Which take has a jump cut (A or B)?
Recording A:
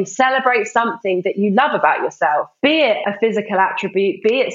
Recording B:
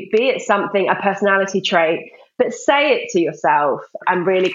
A